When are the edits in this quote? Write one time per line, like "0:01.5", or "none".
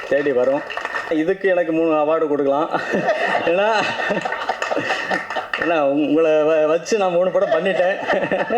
0:01.1